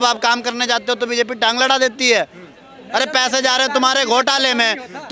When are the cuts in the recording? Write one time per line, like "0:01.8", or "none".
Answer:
none